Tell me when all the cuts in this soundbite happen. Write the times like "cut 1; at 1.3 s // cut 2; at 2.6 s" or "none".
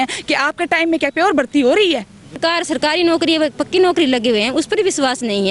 cut 1; at 2.2 s